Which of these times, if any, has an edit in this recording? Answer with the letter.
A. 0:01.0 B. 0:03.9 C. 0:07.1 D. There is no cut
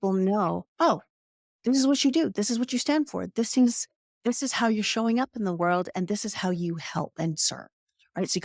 D